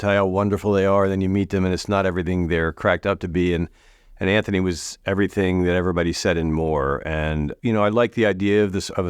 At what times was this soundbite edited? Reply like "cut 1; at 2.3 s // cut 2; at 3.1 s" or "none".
cut 1; at 7.5 s